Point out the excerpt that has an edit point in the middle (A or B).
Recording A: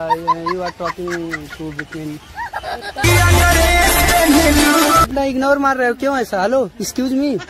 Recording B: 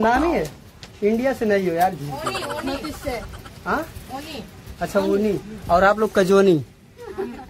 A